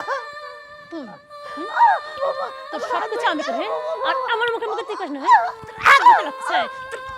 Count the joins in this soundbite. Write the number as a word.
one